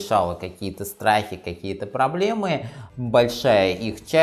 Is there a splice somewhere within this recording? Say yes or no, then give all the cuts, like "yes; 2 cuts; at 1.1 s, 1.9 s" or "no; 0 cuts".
yes; 1 cut; at 2.8 s